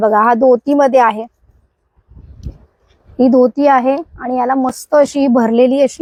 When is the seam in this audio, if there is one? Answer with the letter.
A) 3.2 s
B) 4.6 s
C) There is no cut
C